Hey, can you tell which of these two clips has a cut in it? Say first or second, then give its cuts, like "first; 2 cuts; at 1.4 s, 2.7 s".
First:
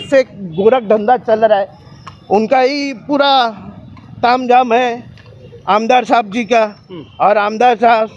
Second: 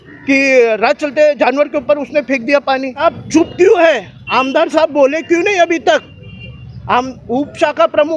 second; 1 cut; at 3.0 s